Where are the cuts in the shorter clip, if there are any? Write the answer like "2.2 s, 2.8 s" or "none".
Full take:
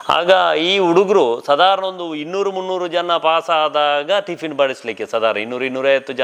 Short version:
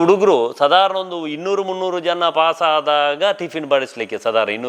none